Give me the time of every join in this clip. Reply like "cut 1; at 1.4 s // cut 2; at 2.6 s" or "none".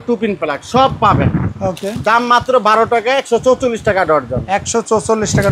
none

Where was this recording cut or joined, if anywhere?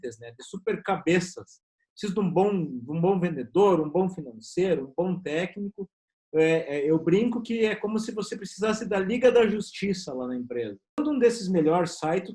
cut 1; at 11.0 s

